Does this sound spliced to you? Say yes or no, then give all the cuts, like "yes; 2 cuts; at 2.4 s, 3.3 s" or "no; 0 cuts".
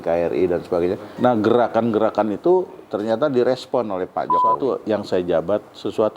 yes; 2 cuts; at 1.1 s, 4.6 s